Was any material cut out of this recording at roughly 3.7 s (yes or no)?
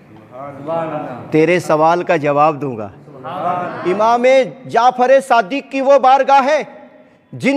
yes